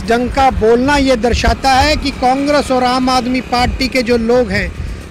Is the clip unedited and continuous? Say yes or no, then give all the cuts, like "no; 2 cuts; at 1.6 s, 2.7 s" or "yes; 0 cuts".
yes; 0 cuts